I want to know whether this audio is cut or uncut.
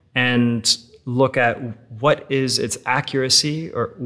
uncut